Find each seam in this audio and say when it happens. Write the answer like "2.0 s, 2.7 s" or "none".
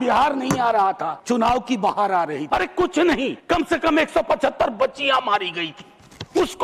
1.1 s, 2.4 s, 3.4 s